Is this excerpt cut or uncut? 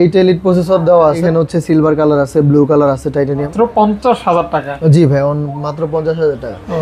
cut